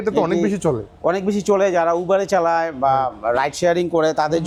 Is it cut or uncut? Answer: uncut